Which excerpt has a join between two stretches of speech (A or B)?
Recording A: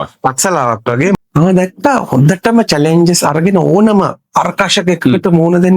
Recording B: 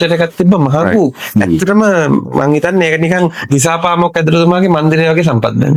A